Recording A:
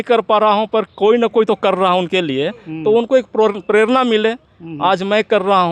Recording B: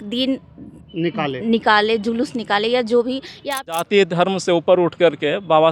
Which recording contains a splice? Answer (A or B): B